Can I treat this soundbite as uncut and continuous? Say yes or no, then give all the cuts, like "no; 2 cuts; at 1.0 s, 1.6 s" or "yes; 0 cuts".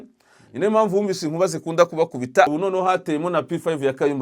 no; 1 cut; at 2.5 s